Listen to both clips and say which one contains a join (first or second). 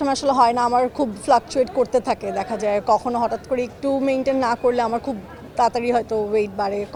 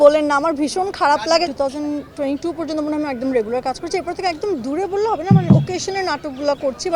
second